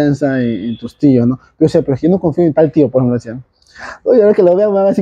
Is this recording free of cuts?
yes; 0 cuts

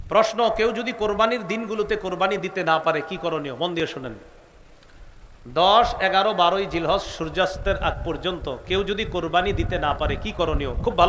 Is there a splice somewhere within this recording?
no; 0 cuts

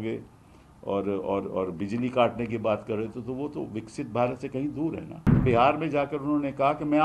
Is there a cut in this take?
yes; 1 cut; at 5.4 s

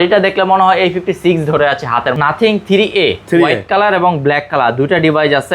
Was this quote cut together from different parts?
yes; 1 cut; at 2.1 s

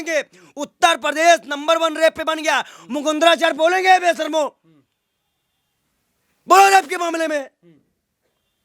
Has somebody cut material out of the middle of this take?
no; 0 cuts

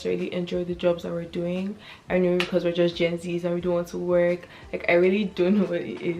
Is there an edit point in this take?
no; 0 cuts

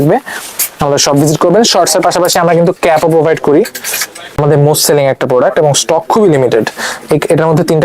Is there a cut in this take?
yes; 1 cut; at 4.3 s

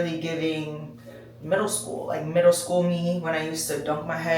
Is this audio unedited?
yes; 0 cuts

